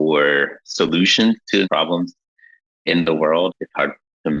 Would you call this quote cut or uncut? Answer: cut